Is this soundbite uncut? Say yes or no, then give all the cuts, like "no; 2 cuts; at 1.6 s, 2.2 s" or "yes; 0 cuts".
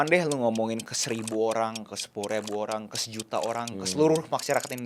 yes; 0 cuts